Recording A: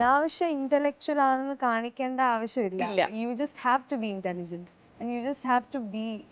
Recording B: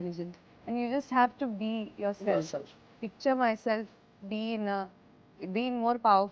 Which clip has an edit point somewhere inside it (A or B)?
B